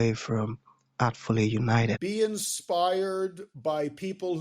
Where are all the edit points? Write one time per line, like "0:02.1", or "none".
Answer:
0:02.0